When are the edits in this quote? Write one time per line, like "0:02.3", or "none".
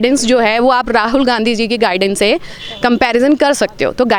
none

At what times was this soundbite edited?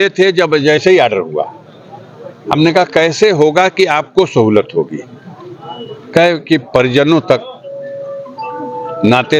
none

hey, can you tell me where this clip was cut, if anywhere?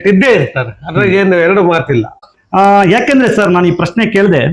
none

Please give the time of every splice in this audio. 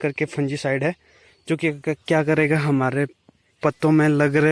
none

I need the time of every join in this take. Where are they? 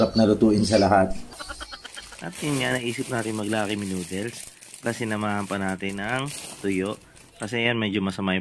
0:01.2

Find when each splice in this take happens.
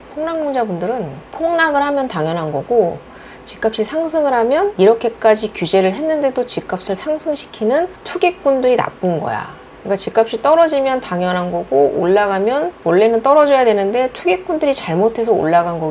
0:04.7

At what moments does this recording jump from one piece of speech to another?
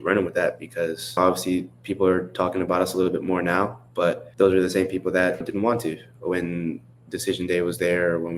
0:01.2
0:04.3
0:05.5

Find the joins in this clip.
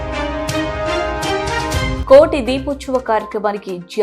0:02.0

